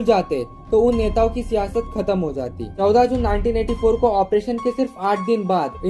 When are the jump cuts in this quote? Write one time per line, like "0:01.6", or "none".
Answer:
0:02.7